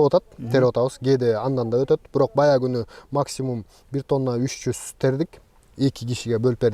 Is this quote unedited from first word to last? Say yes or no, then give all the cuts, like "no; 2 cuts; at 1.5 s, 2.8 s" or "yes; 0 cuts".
yes; 0 cuts